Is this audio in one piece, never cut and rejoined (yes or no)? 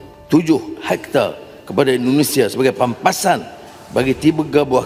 yes